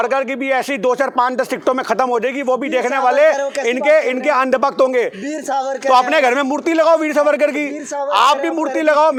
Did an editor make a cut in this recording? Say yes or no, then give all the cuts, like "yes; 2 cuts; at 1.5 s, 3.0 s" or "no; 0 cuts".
no; 0 cuts